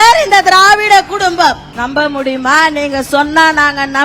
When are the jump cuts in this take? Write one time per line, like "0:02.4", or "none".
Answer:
0:01.7